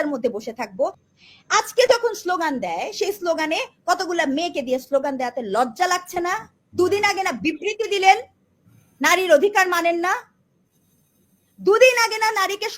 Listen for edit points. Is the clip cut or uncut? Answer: cut